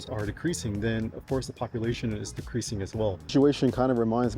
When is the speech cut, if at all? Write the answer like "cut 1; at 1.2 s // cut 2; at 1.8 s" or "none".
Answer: cut 1; at 3.3 s

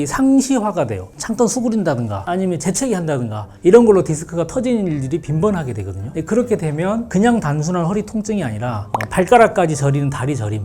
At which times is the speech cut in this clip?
cut 1; at 1.0 s

